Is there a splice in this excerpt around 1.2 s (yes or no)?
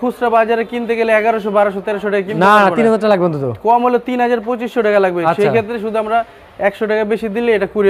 no